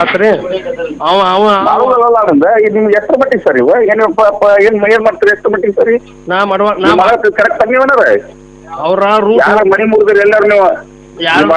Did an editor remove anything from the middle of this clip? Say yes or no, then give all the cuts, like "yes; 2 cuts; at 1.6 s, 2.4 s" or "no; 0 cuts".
no; 0 cuts